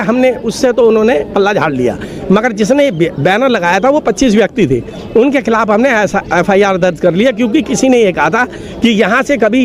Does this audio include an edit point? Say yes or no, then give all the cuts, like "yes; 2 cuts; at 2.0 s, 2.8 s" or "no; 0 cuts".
no; 0 cuts